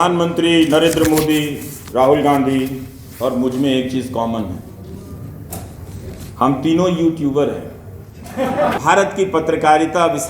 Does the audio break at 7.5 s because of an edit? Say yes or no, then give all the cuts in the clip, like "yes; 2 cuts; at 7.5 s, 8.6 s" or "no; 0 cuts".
no; 1 cut; at 8.8 s